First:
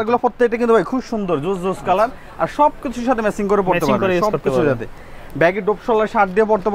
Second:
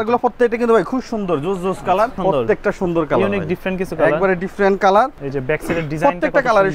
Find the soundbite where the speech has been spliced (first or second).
second